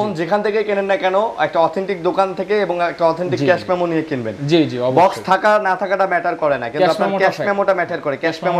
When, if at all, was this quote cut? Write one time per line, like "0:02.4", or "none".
none